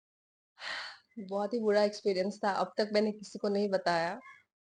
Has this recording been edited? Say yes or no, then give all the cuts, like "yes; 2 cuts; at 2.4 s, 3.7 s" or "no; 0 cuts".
no; 0 cuts